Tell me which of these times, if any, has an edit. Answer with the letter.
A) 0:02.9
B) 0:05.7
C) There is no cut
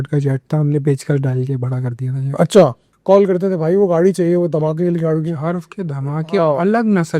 A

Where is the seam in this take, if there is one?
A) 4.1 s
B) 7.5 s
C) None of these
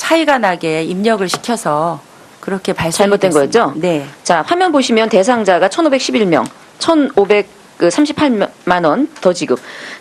A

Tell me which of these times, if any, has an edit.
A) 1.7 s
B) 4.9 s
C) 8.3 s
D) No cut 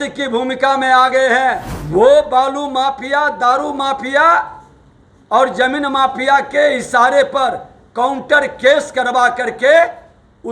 A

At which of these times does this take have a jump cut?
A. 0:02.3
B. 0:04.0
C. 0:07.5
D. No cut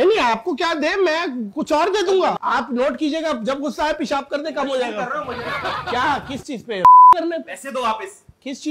A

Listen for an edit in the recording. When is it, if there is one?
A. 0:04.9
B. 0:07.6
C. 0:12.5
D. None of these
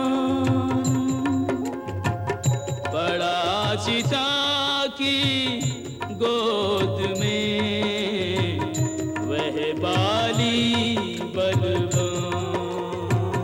D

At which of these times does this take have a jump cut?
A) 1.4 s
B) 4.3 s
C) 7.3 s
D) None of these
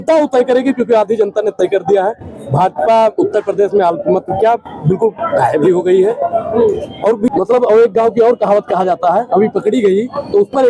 C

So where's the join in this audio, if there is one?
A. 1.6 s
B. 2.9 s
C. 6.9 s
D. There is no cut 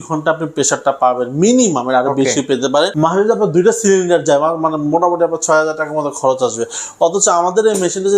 B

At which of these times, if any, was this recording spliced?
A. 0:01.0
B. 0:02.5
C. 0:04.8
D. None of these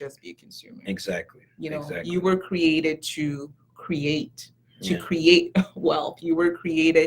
D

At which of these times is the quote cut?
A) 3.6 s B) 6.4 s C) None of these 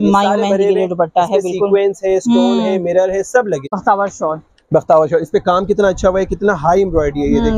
A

